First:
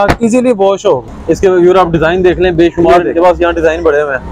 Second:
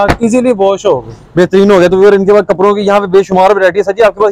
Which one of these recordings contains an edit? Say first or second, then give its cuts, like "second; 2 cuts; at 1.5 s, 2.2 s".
first; 1 cut; at 1.1 s